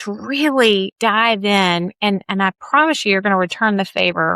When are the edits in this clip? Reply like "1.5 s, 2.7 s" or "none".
0.9 s